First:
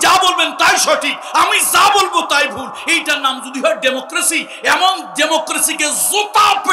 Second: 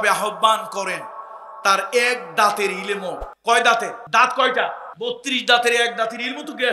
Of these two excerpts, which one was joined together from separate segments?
second; 3 cuts; at 3.3 s, 4.0 s, 4.9 s

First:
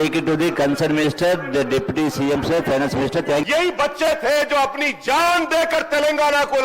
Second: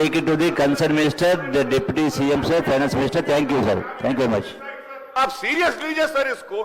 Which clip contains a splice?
first; 1 cut; at 3.5 s

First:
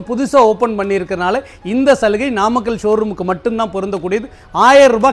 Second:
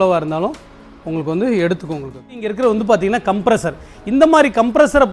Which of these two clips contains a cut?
second; 1 cut; at 2.4 s

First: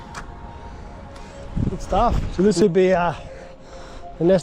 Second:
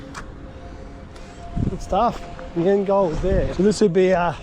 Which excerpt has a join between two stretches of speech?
first; 1 cut; at 2.3 s

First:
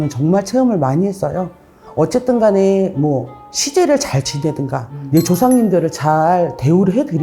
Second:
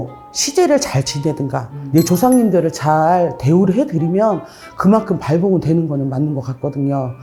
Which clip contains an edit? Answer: first; 1 cut; at 1.8 s

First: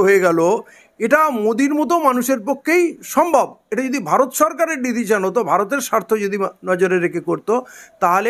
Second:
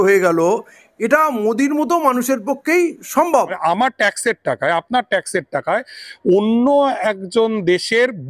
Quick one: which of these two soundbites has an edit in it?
second; 1 cut; at 3.5 s

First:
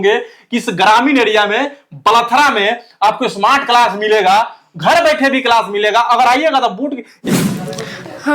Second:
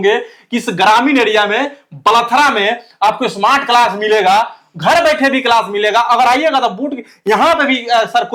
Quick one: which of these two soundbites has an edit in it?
first; 1 cut; at 7.2 s

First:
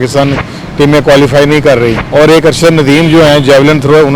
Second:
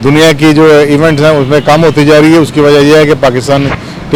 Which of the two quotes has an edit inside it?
first; 1 cut; at 2.0 s

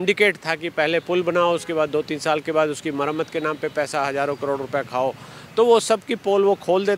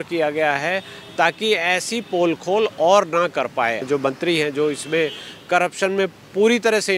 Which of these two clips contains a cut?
second; 1 cut; at 3.8 s

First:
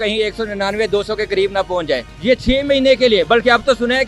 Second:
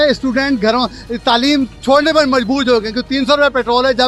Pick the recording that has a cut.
first; 1 cut; at 2.1 s

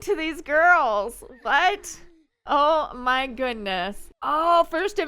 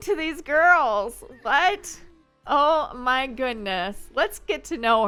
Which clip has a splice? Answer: first; 1 cut; at 4.1 s

